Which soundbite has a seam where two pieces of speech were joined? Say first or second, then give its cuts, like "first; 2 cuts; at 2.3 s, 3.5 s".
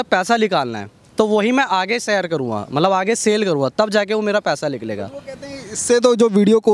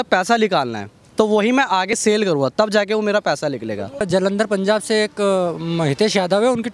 second; 2 cuts; at 2.0 s, 4.1 s